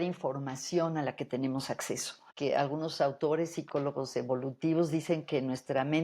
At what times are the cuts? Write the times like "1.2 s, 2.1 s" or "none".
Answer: 2.3 s